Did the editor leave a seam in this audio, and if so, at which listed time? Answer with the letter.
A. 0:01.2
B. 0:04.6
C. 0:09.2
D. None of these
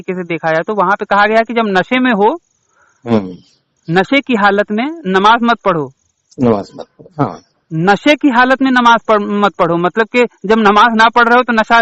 D